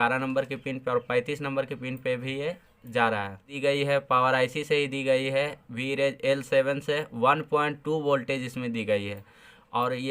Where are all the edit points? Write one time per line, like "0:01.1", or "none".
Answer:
0:03.5